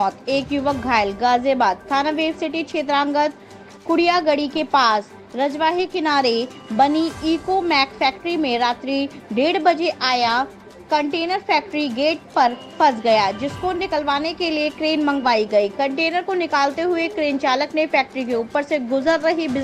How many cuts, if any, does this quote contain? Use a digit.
0